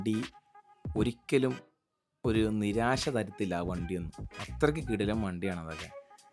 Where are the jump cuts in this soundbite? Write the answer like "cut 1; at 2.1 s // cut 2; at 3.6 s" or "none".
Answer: none

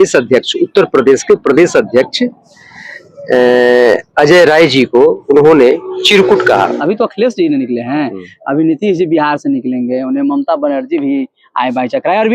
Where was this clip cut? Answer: cut 1; at 6.8 s

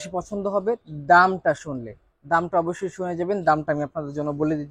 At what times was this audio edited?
none

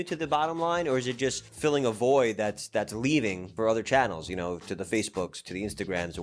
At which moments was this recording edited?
cut 1; at 1.5 s // cut 2; at 3.5 s

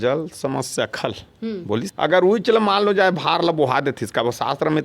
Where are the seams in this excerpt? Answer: cut 1; at 1.9 s

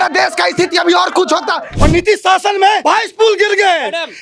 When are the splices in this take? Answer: cut 1; at 1.7 s // cut 2; at 2.8 s

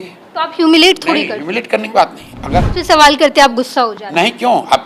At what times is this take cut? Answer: cut 1; at 2.6 s

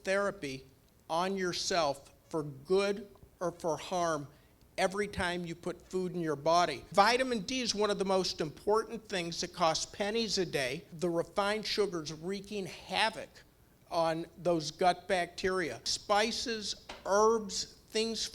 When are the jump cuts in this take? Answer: cut 1; at 6.9 s // cut 2; at 10.8 s // cut 3; at 15.9 s

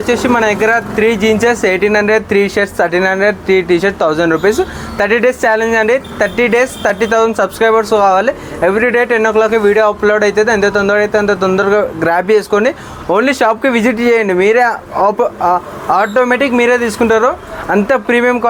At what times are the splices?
none

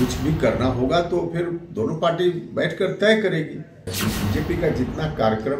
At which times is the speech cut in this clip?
cut 1; at 3.9 s

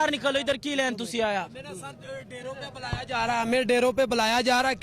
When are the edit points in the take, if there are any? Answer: none

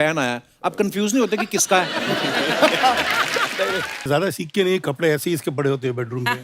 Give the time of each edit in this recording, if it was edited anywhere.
cut 1; at 4.1 s

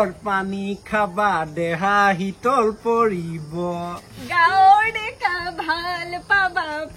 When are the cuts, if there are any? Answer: none

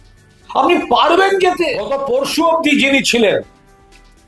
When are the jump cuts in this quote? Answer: cut 1; at 2.0 s

